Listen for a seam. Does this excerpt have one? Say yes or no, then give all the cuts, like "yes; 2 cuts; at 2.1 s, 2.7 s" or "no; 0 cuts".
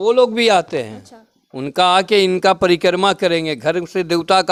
no; 0 cuts